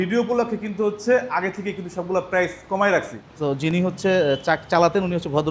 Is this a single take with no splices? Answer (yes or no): no